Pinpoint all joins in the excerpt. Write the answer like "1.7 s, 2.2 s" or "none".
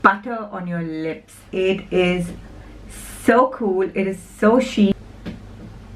4.9 s